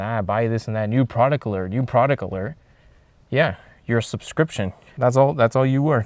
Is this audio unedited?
no; 1 cut; at 4.8 s

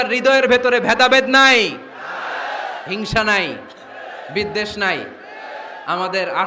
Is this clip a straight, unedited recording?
yes; 0 cuts

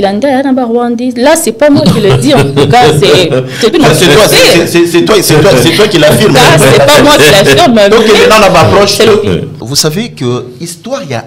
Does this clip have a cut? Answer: yes; 1 cut; at 9.5 s

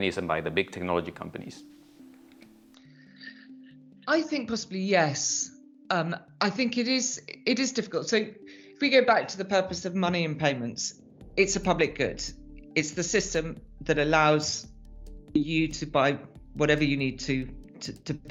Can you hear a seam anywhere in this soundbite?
no; 0 cuts

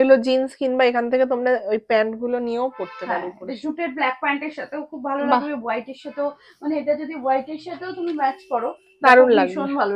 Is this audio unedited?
yes; 0 cuts

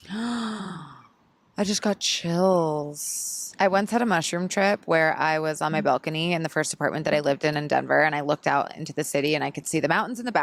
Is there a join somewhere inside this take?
yes; 1 cut; at 3.4 s

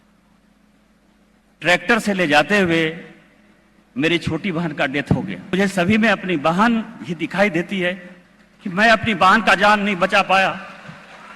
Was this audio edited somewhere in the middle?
yes; 1 cut; at 5.5 s

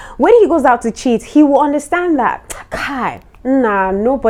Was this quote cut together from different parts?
no; 0 cuts

